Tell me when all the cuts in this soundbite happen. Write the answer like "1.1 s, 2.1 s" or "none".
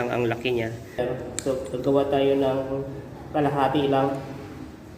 1.0 s